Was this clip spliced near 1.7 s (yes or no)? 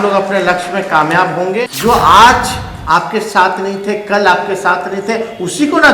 yes